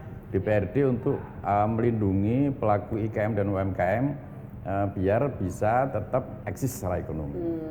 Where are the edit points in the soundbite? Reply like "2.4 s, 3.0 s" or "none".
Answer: 6.4 s